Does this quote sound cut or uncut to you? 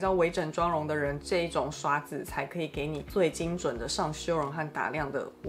uncut